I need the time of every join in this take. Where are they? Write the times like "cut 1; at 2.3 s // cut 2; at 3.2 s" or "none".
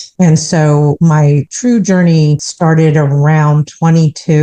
cut 1; at 1.1 s // cut 2; at 2.5 s